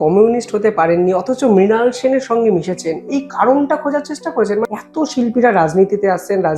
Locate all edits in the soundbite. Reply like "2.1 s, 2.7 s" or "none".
4.7 s